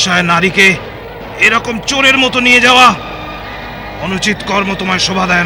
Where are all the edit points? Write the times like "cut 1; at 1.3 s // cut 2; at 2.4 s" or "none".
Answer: none